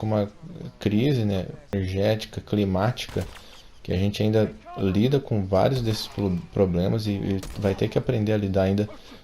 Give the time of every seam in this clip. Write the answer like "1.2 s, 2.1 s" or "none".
1.7 s